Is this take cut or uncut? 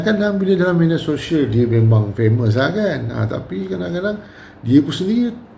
uncut